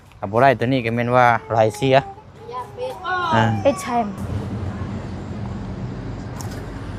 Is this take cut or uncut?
uncut